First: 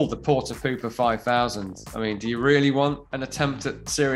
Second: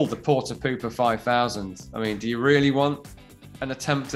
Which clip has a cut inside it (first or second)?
first